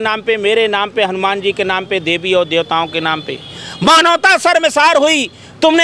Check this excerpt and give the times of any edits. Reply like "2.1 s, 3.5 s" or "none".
none